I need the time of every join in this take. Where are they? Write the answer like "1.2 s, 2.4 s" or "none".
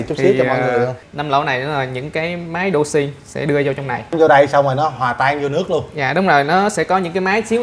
1.1 s, 4.1 s